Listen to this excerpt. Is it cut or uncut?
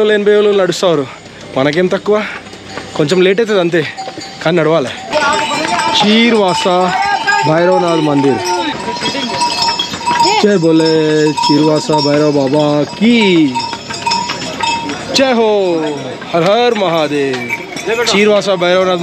uncut